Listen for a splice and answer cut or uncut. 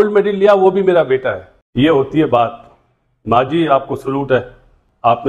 uncut